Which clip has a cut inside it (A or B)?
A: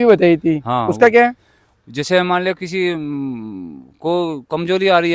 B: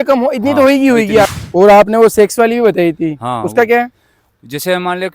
B